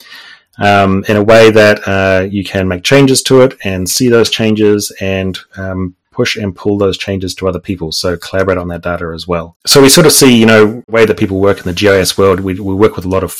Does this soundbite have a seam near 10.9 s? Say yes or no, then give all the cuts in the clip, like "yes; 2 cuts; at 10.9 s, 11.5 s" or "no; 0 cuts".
yes; 2 cuts; at 9.6 s, 10.9 s